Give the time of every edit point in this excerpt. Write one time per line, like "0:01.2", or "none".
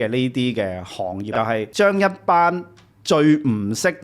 0:01.3